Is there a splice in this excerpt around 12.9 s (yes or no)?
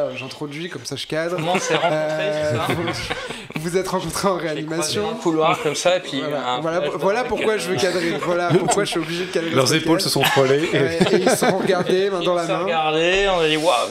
no